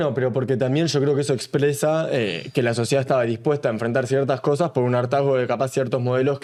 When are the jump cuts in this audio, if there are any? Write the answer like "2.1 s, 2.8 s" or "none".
none